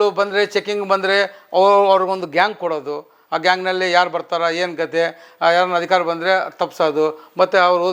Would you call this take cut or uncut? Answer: uncut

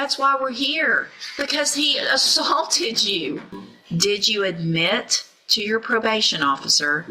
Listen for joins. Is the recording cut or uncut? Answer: cut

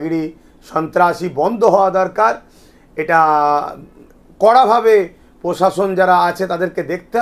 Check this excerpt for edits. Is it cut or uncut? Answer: uncut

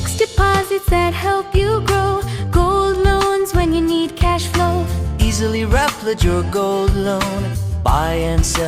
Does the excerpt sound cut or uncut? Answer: uncut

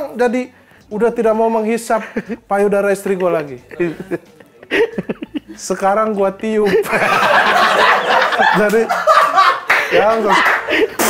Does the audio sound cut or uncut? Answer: uncut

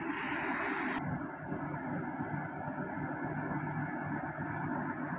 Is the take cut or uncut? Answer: cut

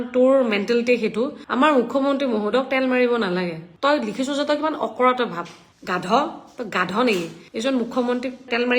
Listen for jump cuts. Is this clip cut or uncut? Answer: cut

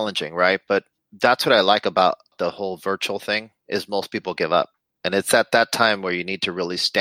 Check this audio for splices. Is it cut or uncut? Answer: uncut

